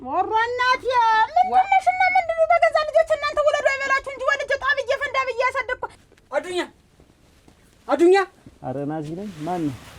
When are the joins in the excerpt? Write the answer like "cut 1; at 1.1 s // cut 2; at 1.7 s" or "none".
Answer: cut 1; at 5.9 s